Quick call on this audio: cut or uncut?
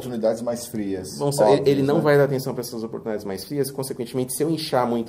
uncut